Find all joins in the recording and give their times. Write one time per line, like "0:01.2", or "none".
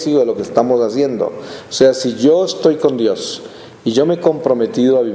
0:04.2